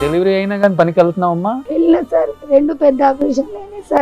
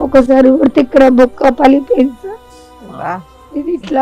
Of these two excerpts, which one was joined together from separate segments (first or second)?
first